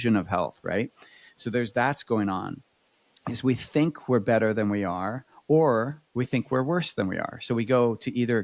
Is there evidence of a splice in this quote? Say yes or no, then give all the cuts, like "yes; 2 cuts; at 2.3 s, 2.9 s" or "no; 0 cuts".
no; 0 cuts